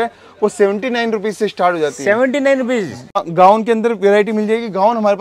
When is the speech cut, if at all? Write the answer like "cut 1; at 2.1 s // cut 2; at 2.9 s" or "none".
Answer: cut 1; at 3.1 s